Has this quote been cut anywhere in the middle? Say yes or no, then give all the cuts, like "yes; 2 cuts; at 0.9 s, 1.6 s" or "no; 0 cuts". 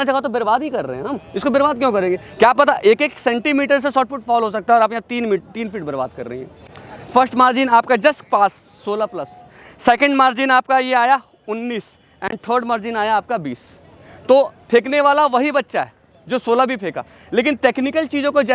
yes; 1 cut; at 6.6 s